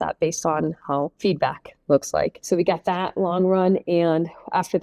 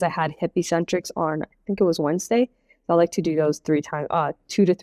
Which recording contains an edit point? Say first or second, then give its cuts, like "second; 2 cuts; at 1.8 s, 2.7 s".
first; 2 cuts; at 1.1 s, 2.4 s